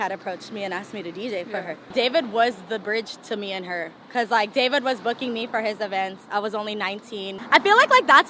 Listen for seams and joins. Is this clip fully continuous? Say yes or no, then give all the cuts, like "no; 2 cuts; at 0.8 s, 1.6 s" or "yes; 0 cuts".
no; 2 cuts; at 1.8 s, 7.3 s